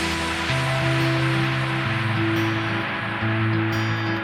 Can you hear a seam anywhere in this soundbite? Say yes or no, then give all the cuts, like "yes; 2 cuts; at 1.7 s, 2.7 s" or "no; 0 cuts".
no; 0 cuts